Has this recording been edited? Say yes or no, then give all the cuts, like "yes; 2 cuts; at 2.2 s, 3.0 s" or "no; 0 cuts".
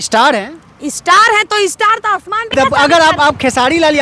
yes; 1 cut; at 2.5 s